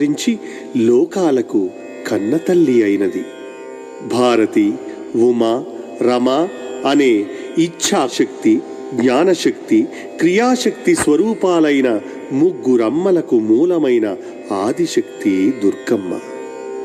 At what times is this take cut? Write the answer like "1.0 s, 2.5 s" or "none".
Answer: none